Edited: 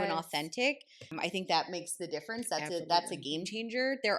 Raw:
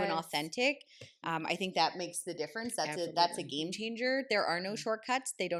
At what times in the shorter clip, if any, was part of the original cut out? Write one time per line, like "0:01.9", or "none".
0:01.1